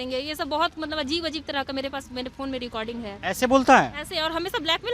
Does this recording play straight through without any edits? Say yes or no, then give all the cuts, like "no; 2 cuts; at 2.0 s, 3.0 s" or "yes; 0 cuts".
yes; 0 cuts